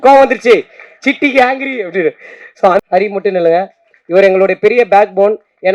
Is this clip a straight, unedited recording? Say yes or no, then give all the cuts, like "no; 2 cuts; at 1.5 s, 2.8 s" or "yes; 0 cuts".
no; 1 cut; at 2.8 s